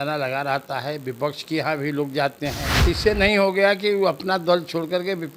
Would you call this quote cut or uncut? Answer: cut